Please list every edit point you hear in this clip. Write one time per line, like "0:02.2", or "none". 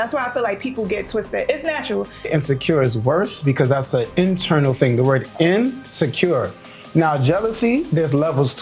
0:02.3

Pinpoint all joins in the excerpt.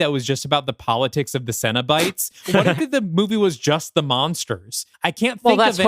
0:02.6
0:04.9

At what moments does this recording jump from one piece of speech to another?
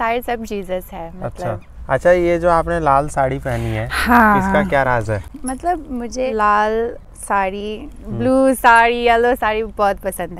0:01.7
0:05.3
0:06.3
0:07.1

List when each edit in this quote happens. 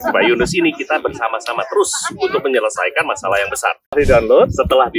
0:03.9

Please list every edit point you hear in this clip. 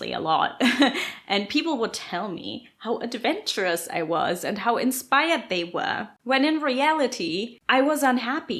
0:06.1
0:07.5

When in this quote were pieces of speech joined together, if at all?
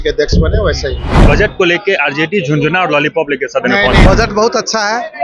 0:01.2
0:04.0

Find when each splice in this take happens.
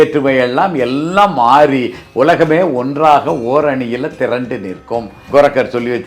0:05.2

